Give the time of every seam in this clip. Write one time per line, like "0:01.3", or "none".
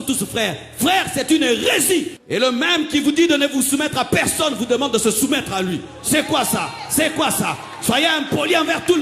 0:02.2